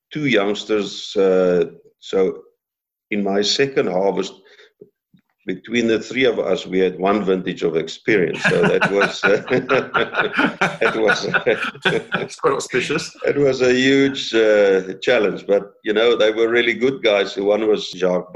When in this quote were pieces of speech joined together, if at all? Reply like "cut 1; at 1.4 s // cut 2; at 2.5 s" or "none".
none